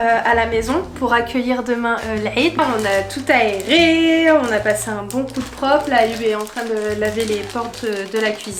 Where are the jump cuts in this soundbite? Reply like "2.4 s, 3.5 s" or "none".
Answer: none